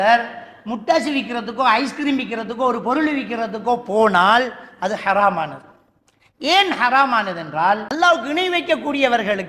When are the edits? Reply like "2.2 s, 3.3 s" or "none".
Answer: 8.0 s